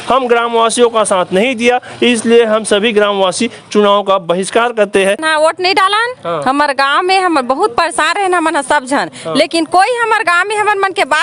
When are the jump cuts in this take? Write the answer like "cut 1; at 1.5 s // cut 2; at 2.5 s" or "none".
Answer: cut 1; at 5.2 s